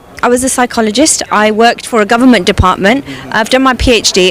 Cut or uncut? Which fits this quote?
uncut